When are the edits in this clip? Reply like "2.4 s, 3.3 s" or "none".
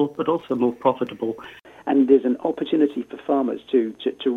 1.6 s